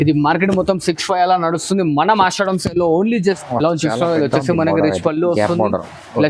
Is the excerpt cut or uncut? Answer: cut